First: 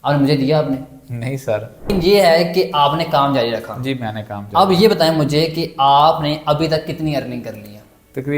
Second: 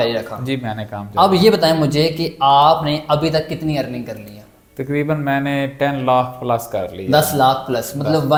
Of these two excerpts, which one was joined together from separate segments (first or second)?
first